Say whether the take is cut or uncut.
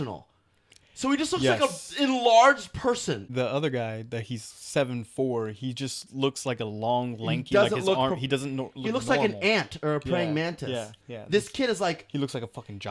cut